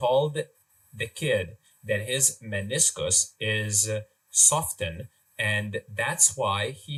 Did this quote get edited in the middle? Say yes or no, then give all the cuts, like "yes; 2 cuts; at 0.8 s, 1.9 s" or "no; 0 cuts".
no; 0 cuts